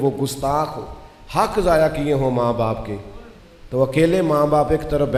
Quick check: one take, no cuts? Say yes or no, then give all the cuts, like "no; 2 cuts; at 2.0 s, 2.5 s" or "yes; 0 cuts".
yes; 0 cuts